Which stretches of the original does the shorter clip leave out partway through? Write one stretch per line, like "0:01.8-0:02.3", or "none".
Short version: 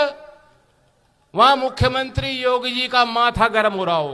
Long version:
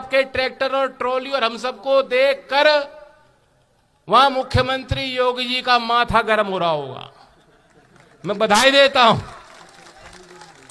none